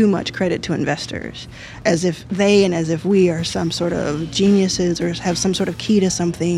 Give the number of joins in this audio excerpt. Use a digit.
1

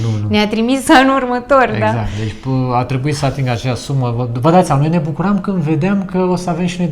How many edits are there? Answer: 0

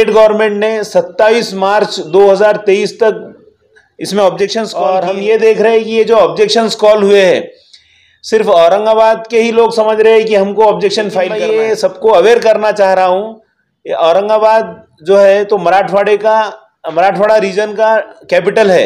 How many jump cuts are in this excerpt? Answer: 2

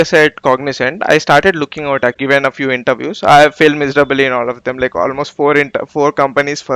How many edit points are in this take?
1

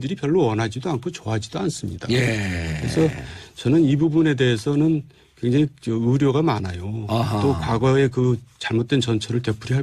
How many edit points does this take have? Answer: 1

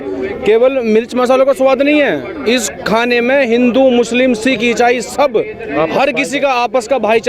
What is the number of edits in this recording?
0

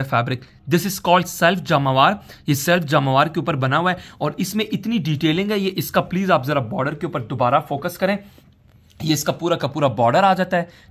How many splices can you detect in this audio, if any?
0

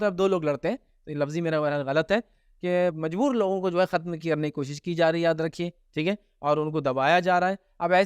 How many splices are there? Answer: 0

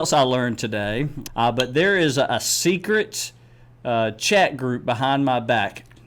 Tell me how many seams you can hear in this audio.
1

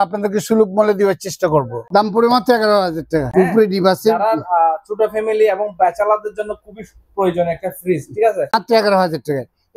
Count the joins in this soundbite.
3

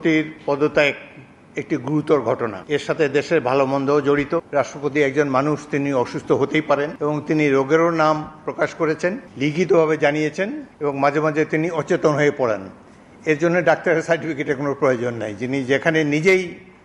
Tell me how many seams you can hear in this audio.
5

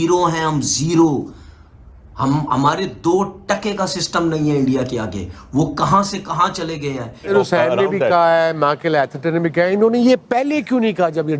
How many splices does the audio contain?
1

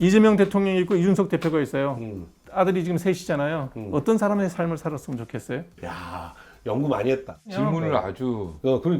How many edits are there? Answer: 2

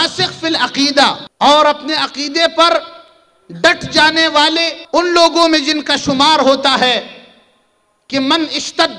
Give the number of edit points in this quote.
2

